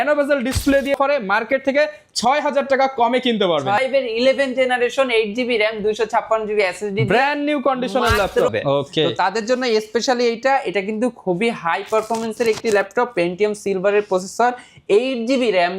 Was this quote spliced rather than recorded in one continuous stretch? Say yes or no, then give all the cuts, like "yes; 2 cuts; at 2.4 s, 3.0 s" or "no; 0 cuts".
yes; 3 cuts; at 1.0 s, 3.8 s, 8.5 s